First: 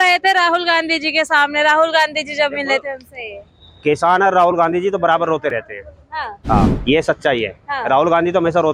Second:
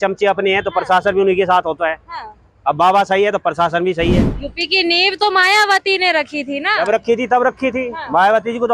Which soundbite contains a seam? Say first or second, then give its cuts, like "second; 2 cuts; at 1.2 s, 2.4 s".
second; 1 cut; at 4.4 s